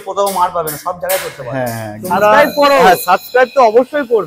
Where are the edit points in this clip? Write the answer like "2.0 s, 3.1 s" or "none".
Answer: 1.9 s